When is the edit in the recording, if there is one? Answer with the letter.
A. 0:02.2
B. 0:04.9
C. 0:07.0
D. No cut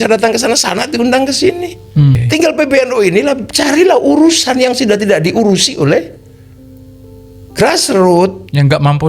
A